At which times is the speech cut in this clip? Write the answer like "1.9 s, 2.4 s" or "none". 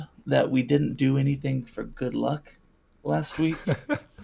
none